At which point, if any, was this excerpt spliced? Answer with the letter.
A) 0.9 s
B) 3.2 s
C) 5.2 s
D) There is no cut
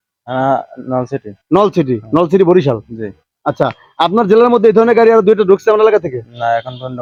D